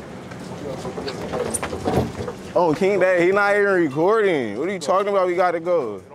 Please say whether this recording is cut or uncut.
uncut